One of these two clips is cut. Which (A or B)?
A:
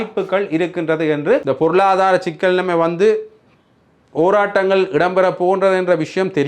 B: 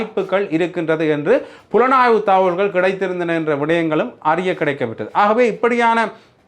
A